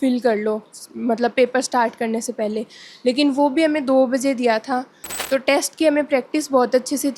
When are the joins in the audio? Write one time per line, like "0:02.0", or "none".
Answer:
0:05.1